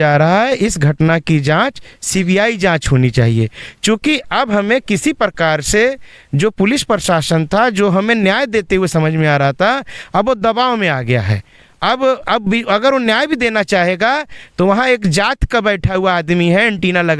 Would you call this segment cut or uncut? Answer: uncut